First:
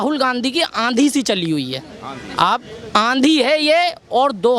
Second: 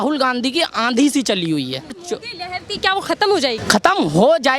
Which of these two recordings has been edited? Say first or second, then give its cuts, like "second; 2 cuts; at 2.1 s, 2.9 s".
second; 2 cuts; at 2.0 s, 3.6 s